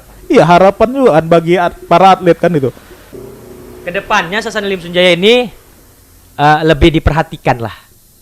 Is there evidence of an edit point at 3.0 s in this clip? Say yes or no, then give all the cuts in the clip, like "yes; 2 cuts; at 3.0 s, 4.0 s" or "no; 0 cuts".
yes; 1 cut; at 3.0 s